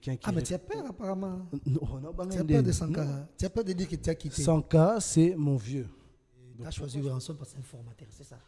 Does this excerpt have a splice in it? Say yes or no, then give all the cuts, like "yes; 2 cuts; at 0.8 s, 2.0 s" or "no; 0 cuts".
yes; 1 cut; at 6.6 s